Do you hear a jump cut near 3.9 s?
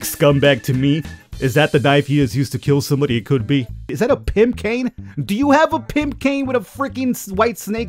yes; 1 cut; at 3.9 s

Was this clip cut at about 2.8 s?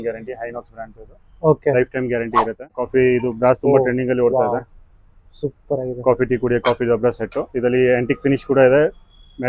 yes; 1 cut; at 2.8 s

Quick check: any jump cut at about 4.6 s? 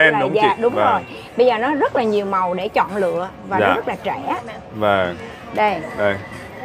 no; 0 cuts

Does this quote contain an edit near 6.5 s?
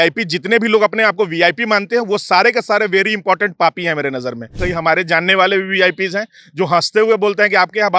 no; 1 cut; at 4.6 s

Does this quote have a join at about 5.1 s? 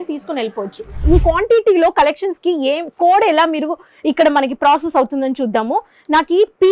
no; 1 cut; at 1.0 s

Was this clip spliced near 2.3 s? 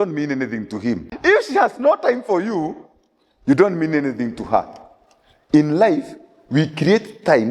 no; 1 cut; at 1.1 s

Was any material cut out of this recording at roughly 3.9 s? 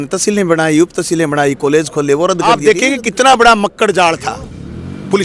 no; 1 cut; at 2.5 s

